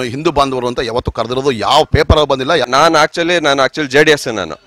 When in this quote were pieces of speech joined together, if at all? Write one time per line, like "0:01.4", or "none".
0:02.6